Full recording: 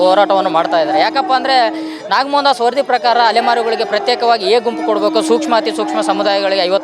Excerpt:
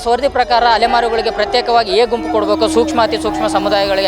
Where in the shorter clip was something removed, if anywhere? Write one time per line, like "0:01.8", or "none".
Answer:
none